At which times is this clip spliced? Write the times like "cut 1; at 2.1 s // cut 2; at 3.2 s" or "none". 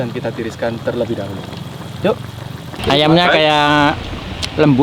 cut 1; at 2.7 s